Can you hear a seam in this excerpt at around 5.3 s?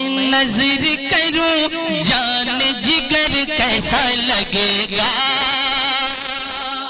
no; 0 cuts

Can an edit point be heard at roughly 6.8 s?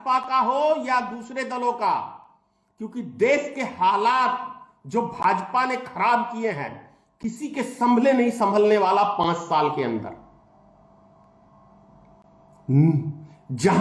no; 0 cuts

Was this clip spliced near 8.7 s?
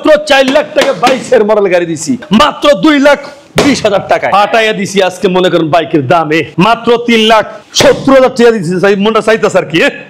no; 3 cuts; at 2.2 s, 4.3 s, 6.5 s

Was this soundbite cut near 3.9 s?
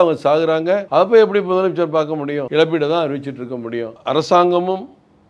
yes; 3 cuts; at 0.8 s, 2.4 s, 3.9 s

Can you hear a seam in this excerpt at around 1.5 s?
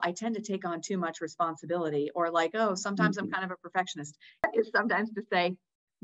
no; 1 cut; at 4.4 s

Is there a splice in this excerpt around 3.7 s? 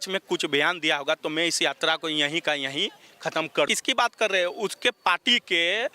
yes; 1 cut; at 3.7 s

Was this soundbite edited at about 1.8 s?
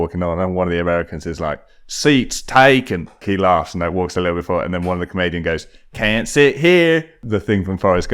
no; 2 cuts; at 3.2 s, 7.2 s

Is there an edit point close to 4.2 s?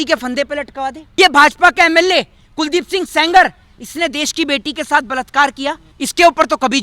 no; 2 cuts; at 1.0 s, 5.9 s

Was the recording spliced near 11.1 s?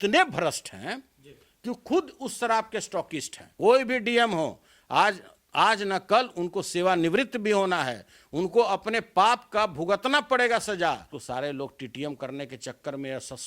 yes; 2 cuts; at 3.5 s, 11.1 s

